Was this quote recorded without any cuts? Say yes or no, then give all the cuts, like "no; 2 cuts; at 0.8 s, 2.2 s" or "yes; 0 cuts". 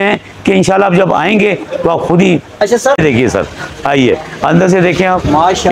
no; 1 cut; at 3.0 s